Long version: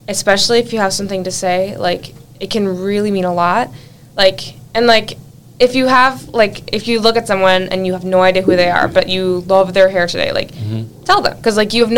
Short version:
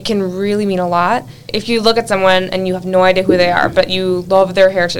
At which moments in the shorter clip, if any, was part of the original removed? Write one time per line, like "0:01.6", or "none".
0:01.5